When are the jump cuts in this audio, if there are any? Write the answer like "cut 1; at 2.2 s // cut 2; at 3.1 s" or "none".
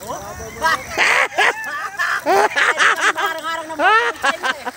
none